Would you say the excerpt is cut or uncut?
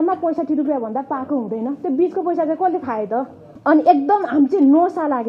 cut